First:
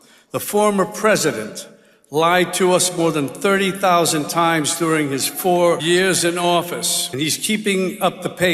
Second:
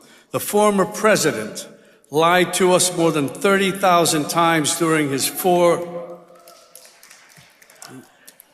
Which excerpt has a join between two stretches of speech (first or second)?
first